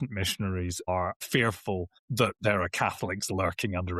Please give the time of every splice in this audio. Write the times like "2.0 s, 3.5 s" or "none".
0.9 s, 2.0 s